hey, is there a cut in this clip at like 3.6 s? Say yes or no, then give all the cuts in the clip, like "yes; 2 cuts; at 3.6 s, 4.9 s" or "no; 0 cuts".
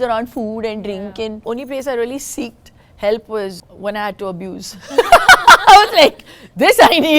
yes; 2 cuts; at 1.4 s, 3.6 s